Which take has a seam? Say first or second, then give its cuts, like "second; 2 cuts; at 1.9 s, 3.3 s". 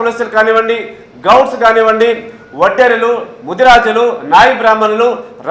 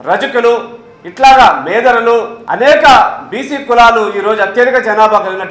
second; 1 cut; at 2.4 s